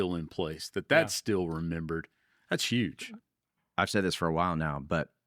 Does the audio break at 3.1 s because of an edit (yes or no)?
yes